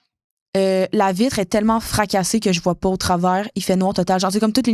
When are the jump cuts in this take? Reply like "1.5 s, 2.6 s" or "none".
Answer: none